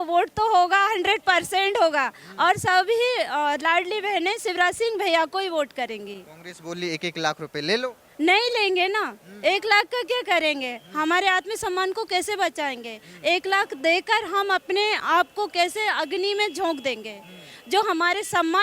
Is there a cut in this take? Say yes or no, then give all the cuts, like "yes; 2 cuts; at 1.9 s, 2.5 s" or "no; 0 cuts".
no; 0 cuts